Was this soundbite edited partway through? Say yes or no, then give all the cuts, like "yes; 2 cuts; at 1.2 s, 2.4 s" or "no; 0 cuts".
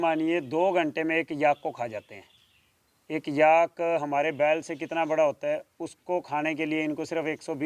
no; 0 cuts